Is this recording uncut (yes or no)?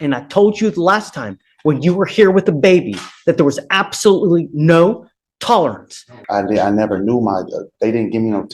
no